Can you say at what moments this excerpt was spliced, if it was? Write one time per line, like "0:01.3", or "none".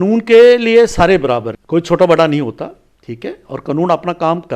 0:01.5